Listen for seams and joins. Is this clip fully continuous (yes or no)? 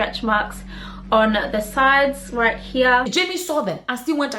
no